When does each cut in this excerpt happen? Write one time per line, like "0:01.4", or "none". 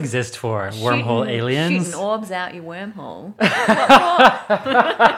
none